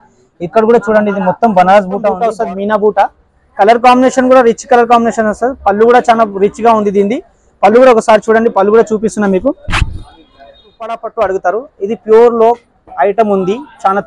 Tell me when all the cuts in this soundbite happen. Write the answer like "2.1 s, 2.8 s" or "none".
2.2 s, 11.0 s